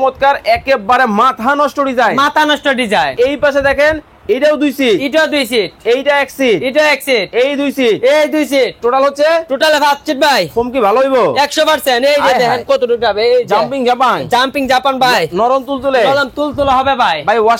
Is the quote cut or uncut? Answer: cut